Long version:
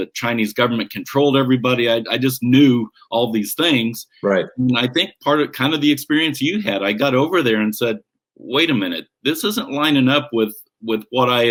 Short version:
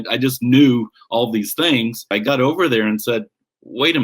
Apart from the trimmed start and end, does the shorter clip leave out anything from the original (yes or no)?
yes